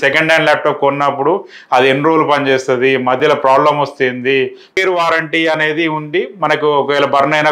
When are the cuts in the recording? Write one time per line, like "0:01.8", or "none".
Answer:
0:04.8